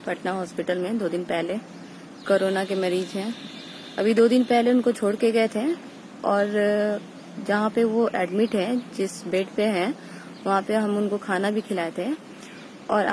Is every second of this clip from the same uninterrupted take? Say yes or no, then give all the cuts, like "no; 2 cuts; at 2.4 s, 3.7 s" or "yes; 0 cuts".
yes; 0 cuts